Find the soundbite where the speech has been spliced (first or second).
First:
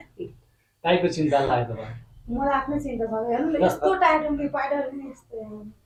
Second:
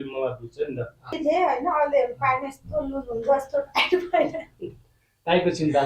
second